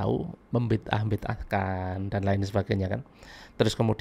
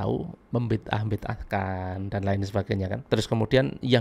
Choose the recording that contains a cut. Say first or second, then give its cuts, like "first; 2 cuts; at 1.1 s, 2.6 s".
second; 1 cut; at 3.0 s